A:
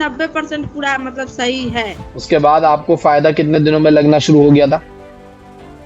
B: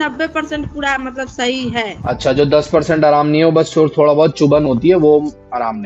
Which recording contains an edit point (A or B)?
A